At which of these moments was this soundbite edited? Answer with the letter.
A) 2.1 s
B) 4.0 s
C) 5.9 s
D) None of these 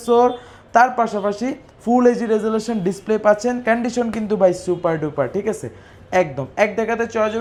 D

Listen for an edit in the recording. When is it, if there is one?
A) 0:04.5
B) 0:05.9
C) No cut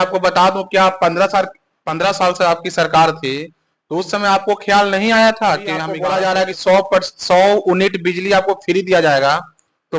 B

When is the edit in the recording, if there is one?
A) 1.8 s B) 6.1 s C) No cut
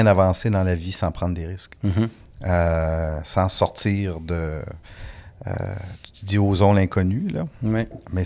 C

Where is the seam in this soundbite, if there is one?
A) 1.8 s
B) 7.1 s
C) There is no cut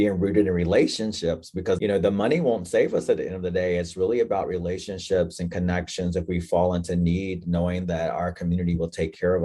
A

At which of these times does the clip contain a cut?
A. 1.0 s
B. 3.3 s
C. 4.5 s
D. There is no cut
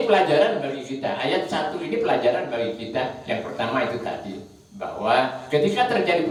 D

